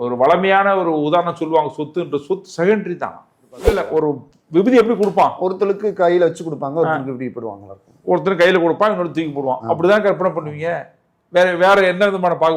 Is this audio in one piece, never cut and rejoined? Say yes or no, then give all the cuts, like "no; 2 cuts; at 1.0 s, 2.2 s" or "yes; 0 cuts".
no; 1 cut; at 3.9 s